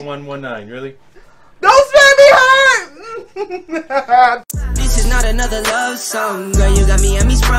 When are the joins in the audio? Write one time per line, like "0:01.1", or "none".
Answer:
0:04.5